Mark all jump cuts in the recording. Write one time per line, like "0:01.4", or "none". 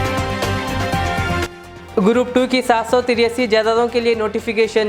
0:01.5